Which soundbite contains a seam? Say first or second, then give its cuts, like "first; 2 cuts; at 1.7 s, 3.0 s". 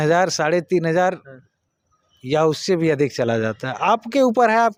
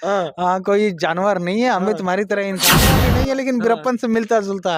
second; 1 cut; at 3.0 s